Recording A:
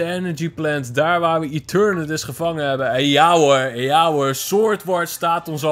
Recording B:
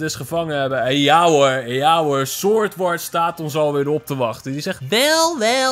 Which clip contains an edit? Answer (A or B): B